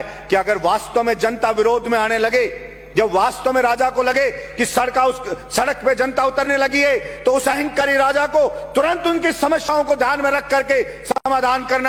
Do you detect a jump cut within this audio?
no; 0 cuts

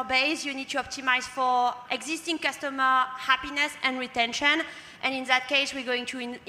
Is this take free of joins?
no; 1 cut; at 1.8 s

